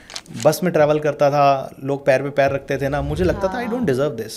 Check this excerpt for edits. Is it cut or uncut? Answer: uncut